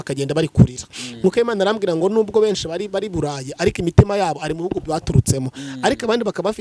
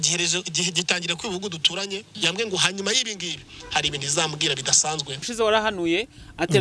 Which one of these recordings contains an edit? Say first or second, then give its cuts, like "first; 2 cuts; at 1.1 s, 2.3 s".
second; 1 cut; at 5.2 s